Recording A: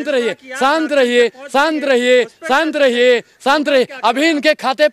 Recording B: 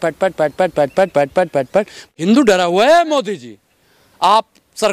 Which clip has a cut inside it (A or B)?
B